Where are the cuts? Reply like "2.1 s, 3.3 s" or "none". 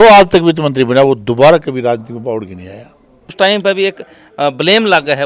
3.3 s